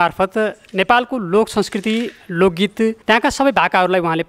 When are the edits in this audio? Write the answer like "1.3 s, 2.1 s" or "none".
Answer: 3.0 s